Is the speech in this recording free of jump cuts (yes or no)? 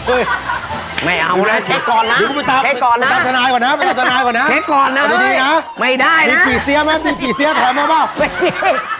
yes